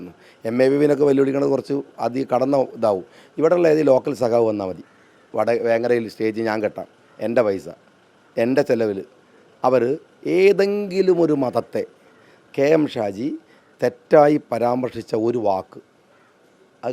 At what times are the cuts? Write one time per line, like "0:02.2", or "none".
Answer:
none